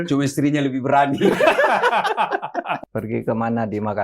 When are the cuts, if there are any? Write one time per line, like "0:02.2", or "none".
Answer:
0:02.8

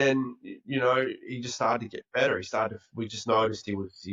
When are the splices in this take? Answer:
none

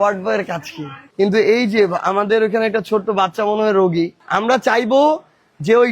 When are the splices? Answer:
0:01.1
0:04.2

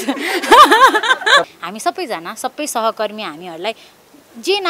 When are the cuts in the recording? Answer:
0:01.4

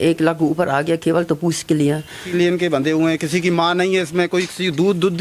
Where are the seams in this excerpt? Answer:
0:02.3

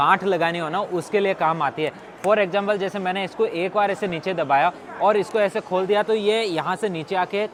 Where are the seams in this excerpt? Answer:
none

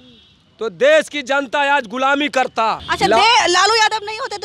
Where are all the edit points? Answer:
none

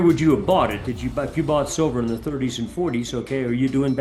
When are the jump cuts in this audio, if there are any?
none

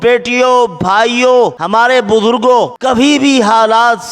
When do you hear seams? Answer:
0:01.6
0:02.8

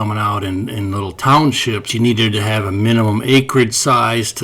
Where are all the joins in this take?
0:01.9

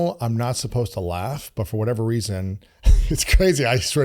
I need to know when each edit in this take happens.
none

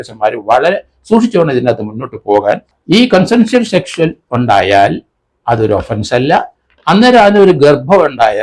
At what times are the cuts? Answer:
0:02.7

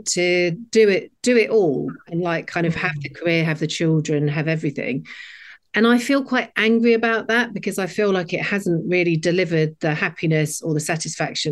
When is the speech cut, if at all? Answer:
none

